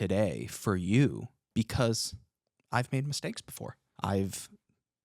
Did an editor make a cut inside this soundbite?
yes; 2 cuts; at 1.4 s, 3.9 s

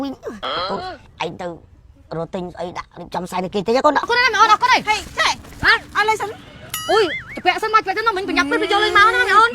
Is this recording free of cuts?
no; 2 cuts; at 0.7 s, 4.1 s

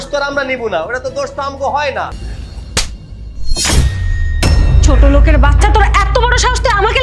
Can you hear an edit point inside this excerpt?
yes; 1 cut; at 2.3 s

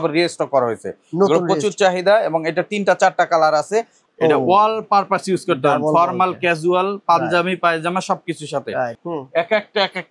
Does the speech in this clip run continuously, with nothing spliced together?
no; 2 cuts; at 4.0 s, 9.0 s

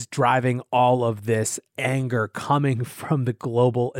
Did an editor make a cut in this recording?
no; 0 cuts

